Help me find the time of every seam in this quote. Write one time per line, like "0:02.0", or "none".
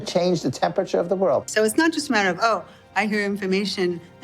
0:01.5